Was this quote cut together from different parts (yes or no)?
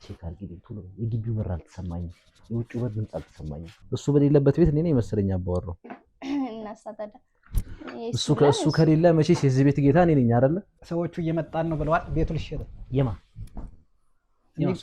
yes